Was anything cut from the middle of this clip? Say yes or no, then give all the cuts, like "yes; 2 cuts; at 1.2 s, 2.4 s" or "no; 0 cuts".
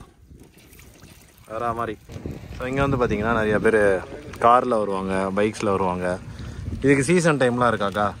yes; 1 cut; at 2.1 s